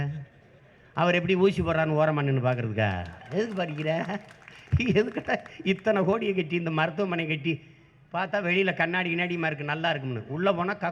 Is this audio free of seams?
yes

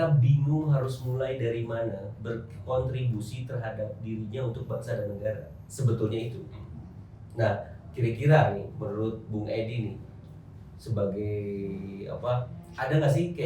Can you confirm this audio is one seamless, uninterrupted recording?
yes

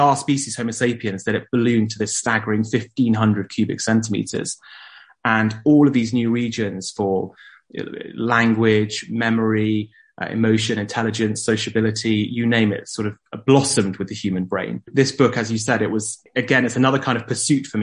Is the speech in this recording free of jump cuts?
no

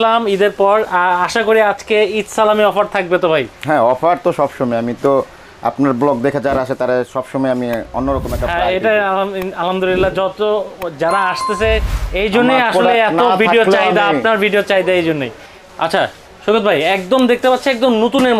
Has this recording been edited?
yes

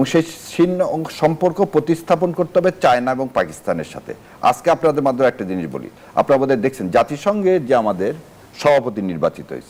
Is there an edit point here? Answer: no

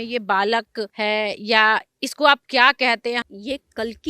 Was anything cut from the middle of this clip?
yes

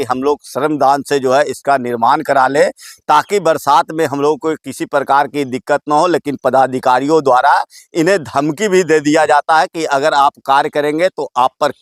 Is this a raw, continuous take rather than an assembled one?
yes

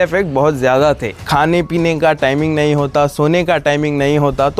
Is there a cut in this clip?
yes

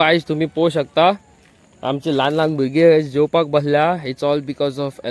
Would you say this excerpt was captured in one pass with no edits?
yes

